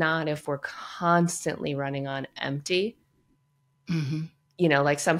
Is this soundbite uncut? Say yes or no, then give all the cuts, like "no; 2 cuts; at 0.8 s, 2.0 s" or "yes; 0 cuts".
yes; 0 cuts